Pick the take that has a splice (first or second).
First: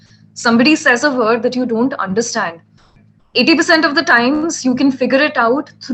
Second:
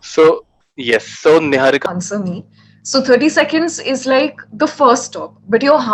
second